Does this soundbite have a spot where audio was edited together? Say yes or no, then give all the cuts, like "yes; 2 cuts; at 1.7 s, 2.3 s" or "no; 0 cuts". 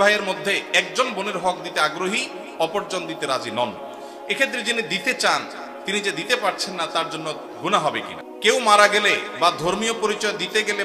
yes; 1 cut; at 8.2 s